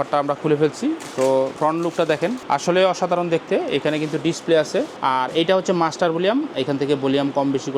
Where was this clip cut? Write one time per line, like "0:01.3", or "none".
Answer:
0:01.5
0:02.4
0:04.9